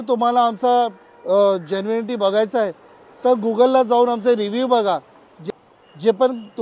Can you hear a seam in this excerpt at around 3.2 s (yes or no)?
no